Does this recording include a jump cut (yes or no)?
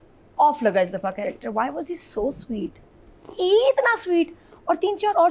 no